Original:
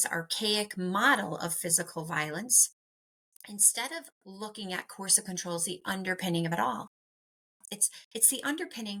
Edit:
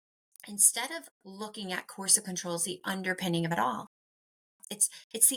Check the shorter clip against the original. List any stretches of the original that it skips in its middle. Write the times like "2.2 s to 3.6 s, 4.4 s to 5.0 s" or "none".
none